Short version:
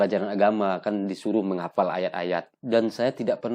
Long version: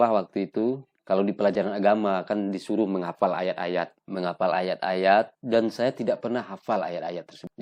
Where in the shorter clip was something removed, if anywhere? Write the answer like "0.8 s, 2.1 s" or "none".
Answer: 2.6 s